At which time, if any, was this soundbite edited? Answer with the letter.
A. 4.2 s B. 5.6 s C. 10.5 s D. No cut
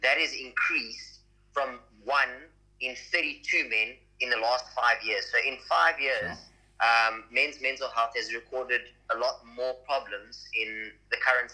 D